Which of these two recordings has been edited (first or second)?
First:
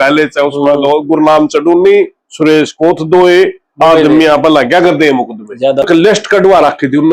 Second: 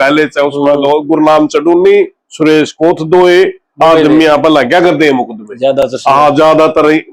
first